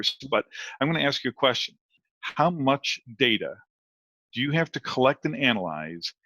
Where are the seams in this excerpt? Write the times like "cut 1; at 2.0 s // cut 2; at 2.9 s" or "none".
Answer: cut 1; at 2.1 s

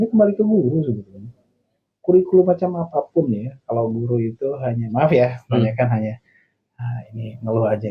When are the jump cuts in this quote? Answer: none

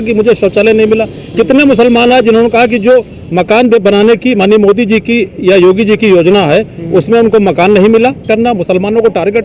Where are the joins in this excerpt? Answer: cut 1; at 8.2 s

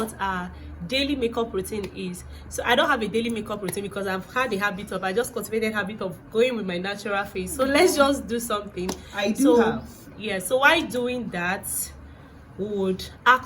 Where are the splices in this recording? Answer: none

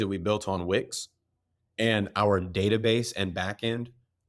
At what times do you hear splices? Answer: none

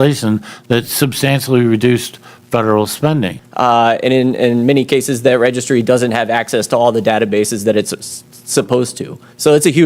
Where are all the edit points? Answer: cut 1; at 3.4 s

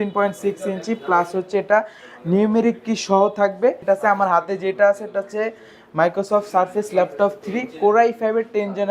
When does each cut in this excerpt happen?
cut 1; at 3.8 s

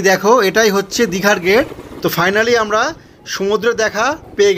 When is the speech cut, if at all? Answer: cut 1; at 1.8 s

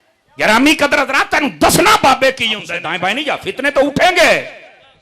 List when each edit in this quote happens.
cut 1; at 2.8 s

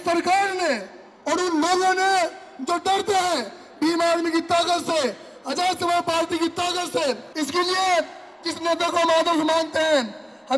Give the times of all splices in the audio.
cut 1; at 7.3 s

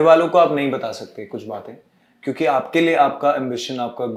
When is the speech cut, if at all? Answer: none

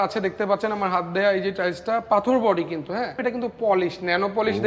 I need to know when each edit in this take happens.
cut 1; at 3.2 s

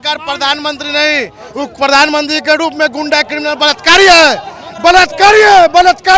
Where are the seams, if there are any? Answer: none

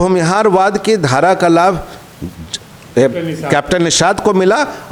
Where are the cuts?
none

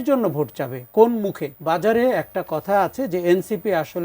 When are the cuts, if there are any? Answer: cut 1; at 1.5 s

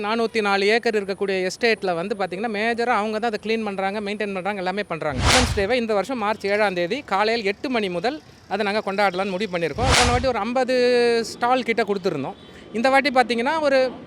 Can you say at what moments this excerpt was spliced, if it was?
cut 1; at 5.3 s // cut 2; at 9.9 s

